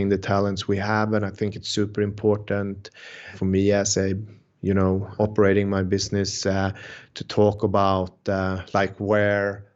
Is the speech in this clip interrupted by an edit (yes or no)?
no